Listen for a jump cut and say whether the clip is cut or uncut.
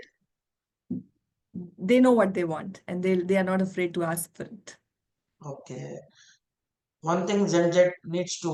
uncut